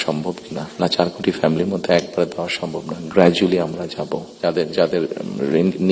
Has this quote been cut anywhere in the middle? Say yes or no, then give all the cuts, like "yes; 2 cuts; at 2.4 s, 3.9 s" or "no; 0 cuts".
yes; 1 cut; at 4.3 s